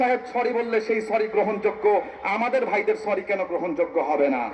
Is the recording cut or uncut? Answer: uncut